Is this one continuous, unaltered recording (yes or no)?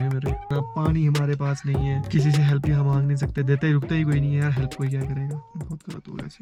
yes